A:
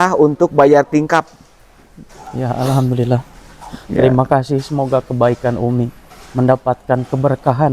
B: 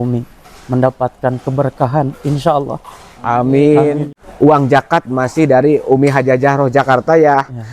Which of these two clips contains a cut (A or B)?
B